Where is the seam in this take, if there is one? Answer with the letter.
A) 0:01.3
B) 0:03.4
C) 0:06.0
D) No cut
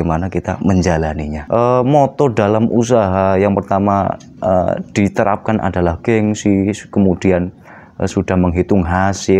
A